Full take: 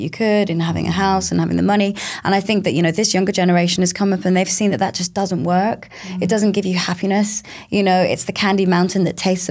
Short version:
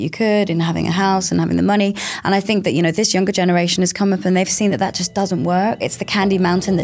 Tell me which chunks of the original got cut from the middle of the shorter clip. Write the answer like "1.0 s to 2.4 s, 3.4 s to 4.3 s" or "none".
5.9 s to 8.2 s

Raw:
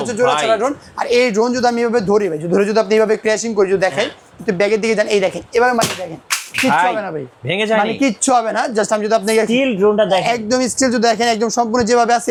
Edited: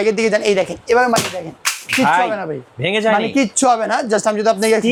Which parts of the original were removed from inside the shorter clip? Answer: none

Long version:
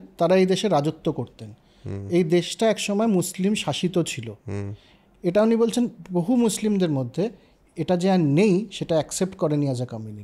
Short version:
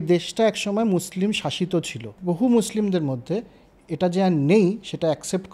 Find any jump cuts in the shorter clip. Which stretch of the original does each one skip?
4.4 s to 6.0 s

